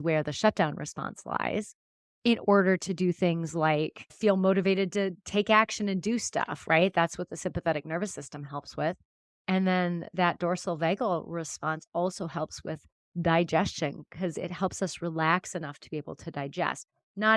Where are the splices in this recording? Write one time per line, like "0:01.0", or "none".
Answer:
0:04.0